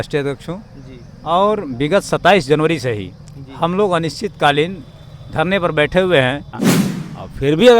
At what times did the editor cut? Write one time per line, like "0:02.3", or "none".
0:06.7